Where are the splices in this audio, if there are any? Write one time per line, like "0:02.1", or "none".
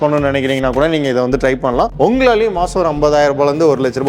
0:01.9